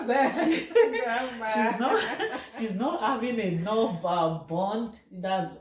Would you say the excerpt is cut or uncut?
uncut